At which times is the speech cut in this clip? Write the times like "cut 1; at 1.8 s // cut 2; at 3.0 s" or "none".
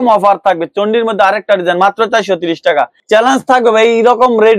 cut 1; at 3.0 s